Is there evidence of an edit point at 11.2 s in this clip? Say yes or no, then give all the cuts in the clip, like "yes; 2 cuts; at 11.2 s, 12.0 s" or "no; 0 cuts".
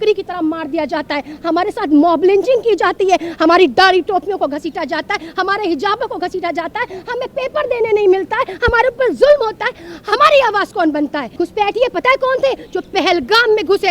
yes; 1 cut; at 11.2 s